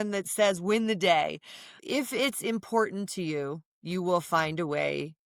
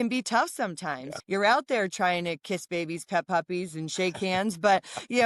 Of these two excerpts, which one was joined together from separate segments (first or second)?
second